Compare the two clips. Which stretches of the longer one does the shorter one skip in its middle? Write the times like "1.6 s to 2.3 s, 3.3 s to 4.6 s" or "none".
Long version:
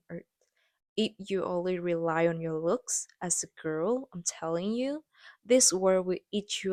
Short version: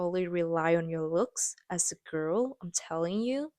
none